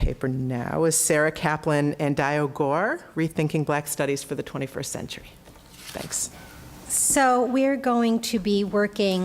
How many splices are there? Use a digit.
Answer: 1